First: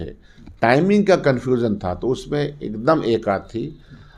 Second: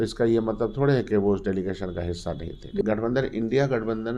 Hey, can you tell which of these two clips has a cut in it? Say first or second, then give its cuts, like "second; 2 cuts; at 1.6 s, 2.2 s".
second; 1 cut; at 2.8 s